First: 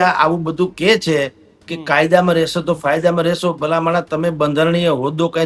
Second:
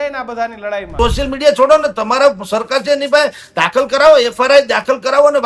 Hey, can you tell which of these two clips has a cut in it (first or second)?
second